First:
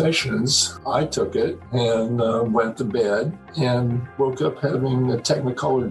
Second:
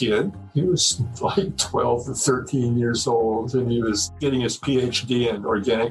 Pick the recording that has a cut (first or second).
second